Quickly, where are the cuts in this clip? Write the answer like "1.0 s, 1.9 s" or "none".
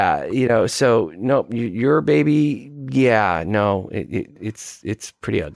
none